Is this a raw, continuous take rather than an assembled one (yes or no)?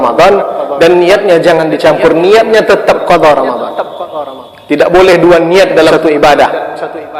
no